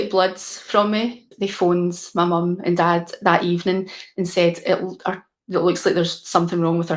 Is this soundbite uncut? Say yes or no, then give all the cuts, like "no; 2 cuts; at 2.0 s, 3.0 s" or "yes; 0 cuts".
no; 1 cut; at 1.2 s